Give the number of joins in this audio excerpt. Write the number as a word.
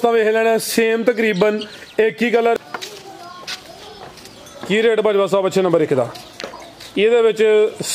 one